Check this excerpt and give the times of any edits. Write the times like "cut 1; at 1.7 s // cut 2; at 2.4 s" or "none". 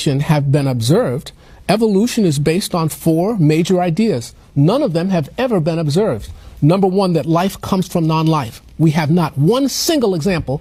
none